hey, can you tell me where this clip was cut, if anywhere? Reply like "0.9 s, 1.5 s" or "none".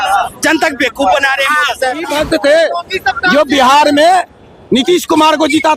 2.1 s